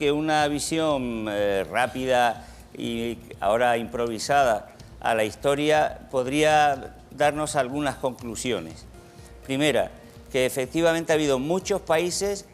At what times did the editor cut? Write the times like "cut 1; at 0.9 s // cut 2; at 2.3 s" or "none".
cut 1; at 1.2 s